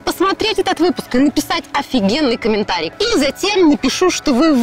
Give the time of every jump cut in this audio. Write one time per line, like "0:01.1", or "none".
0:02.9